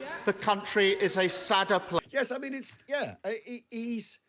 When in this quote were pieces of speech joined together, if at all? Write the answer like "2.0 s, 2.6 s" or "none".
2.0 s